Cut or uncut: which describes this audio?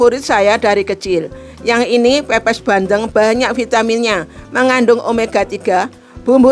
uncut